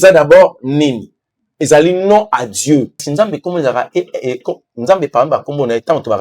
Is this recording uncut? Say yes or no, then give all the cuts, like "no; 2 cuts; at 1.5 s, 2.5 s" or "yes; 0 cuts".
no; 1 cut; at 3.1 s